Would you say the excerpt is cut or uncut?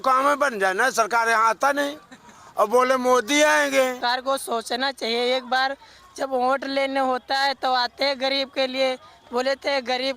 cut